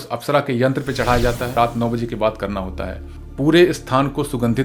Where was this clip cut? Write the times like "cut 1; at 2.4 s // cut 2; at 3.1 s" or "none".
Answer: cut 1; at 1.5 s